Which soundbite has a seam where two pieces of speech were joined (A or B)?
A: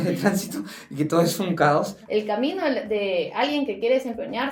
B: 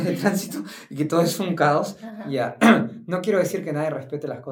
A